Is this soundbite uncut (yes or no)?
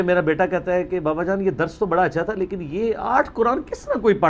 yes